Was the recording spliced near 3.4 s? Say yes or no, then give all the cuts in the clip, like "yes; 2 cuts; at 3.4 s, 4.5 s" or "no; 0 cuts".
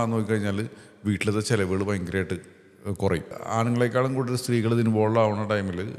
yes; 1 cut; at 3.4 s